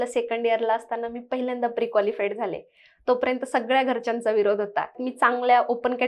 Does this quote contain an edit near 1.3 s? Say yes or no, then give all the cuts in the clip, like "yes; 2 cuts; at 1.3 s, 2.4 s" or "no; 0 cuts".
no; 1 cut; at 5.0 s